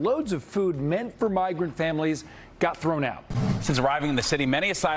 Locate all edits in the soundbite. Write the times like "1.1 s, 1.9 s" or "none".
3.2 s